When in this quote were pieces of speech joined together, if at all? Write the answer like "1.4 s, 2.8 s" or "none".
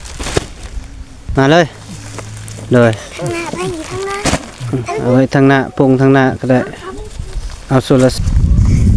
1.3 s, 8.2 s